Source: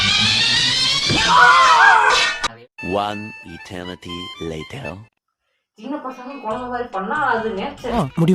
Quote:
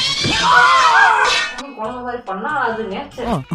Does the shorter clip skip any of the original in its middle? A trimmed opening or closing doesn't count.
yes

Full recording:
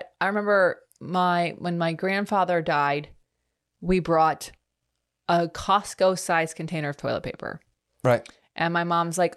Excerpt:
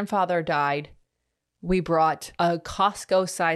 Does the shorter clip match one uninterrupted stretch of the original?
no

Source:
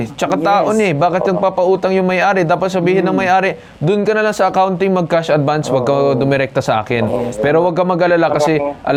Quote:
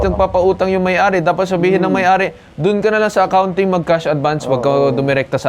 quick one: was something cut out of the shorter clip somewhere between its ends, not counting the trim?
no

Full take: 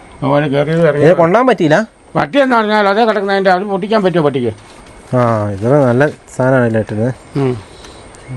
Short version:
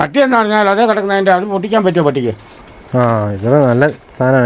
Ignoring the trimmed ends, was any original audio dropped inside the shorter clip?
no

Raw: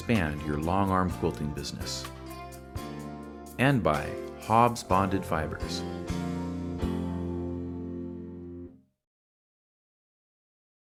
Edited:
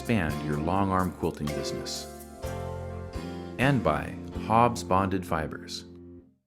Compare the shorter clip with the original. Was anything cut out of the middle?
yes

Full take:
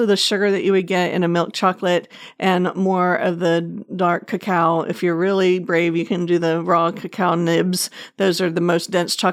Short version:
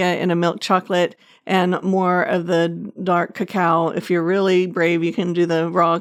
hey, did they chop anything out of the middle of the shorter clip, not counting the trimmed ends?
no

